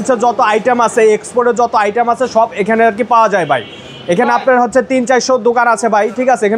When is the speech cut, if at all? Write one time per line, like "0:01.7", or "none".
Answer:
none